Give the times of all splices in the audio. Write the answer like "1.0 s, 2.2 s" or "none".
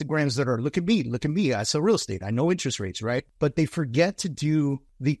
3.3 s